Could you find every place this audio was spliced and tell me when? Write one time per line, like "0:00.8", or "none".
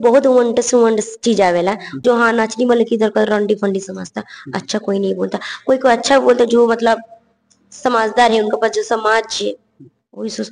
0:02.0